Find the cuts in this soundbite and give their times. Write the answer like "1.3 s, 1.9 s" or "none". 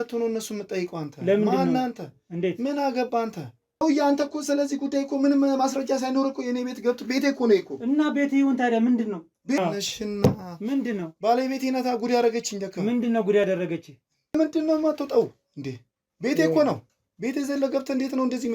3.8 s, 9.6 s, 14.3 s